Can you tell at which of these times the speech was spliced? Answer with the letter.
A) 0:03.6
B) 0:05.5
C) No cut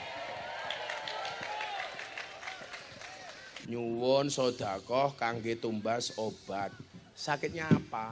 A